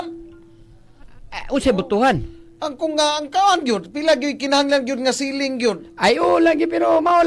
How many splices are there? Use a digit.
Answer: 0